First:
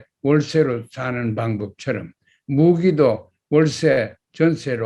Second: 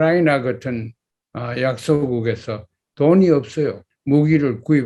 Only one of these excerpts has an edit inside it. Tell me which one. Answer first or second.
second